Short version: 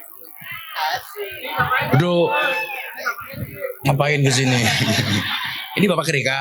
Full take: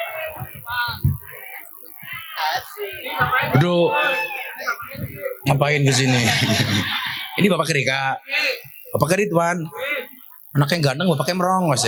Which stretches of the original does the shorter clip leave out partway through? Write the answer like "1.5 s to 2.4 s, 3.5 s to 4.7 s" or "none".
none